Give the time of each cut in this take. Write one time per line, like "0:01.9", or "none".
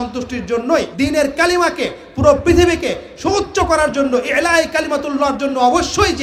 none